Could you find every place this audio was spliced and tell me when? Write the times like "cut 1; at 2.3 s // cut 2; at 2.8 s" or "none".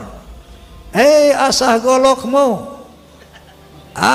none